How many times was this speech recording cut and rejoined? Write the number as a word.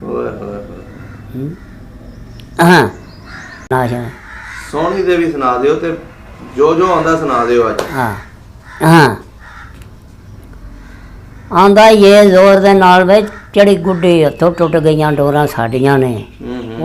one